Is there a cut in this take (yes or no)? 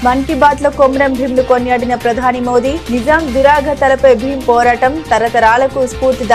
no